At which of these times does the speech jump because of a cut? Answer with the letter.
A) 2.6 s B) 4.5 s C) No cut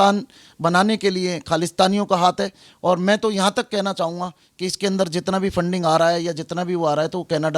C